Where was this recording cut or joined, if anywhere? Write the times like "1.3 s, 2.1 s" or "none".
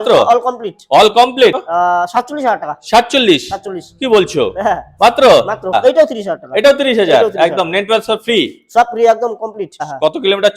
1.6 s, 5.8 s, 9.8 s